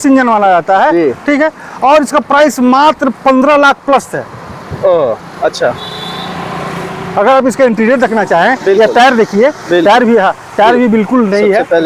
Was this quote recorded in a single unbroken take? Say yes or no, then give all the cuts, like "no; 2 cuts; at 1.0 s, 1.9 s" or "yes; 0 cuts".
yes; 0 cuts